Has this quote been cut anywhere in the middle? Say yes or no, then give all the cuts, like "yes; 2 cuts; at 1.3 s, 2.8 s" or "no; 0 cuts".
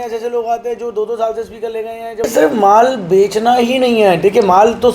yes; 1 cut; at 2.2 s